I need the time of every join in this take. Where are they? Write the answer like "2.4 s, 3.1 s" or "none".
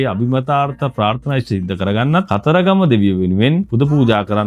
2.3 s, 3.7 s